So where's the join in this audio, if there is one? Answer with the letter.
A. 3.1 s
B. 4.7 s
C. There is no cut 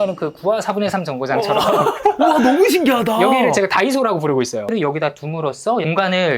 B